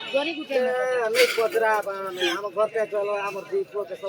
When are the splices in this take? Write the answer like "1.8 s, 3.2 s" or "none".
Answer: none